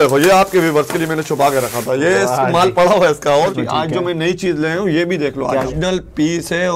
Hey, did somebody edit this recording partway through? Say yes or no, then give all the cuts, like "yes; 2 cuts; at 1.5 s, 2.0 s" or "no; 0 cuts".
yes; 2 cuts; at 3.5 s, 5.7 s